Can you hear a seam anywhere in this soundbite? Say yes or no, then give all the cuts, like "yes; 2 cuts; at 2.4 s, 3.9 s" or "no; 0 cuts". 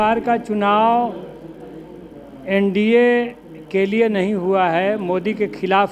no; 0 cuts